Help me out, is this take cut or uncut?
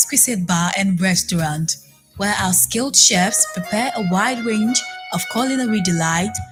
uncut